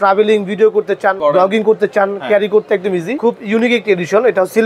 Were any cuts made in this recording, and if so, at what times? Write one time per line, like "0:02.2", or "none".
0:01.2
0:03.2